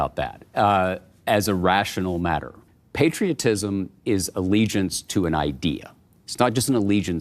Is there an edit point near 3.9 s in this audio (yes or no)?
no